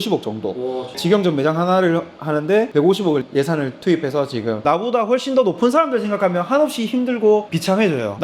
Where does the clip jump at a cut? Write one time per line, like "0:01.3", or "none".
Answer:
0:02.7
0:04.4